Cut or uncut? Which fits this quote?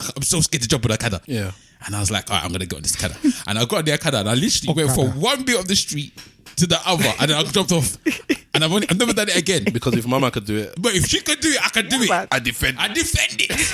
cut